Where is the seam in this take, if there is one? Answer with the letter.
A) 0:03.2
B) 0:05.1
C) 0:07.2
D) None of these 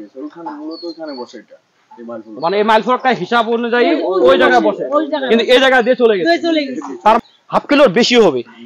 C